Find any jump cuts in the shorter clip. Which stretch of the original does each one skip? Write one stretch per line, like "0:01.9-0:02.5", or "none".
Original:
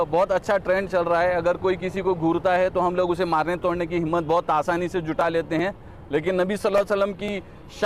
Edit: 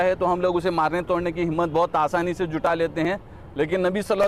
none